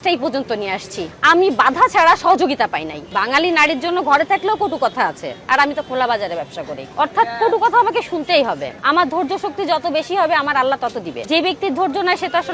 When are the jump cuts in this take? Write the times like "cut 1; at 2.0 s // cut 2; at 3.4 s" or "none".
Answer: cut 1; at 3.0 s // cut 2; at 8.7 s // cut 3; at 11.2 s